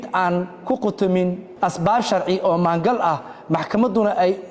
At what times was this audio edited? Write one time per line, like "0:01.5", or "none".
0:01.5